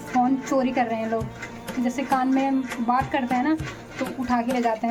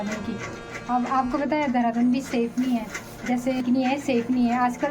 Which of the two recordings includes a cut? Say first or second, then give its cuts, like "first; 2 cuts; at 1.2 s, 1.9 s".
second; 1 cut; at 3.6 s